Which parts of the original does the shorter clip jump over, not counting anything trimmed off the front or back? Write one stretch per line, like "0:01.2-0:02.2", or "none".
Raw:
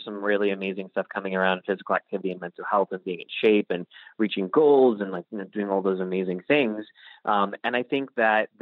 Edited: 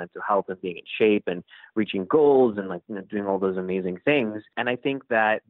0:07.0-0:07.6